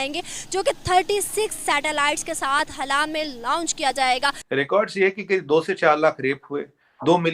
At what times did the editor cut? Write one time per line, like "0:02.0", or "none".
0:04.4